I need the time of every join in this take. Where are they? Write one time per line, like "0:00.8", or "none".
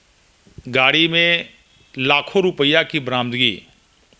none

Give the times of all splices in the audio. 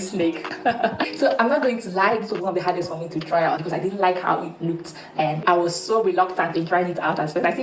none

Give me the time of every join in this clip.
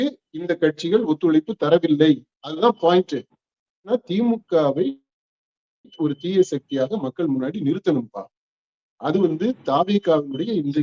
0:03.9

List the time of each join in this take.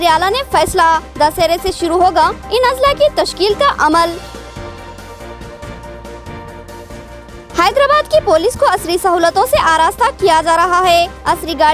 none

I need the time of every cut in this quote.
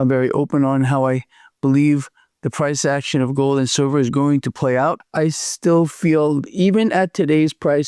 0:05.0

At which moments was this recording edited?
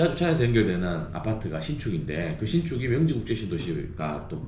none

